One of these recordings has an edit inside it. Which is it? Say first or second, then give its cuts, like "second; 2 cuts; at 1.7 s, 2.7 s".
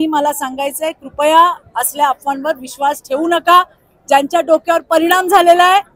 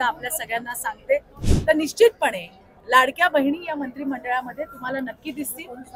second; 1 cut; at 1.4 s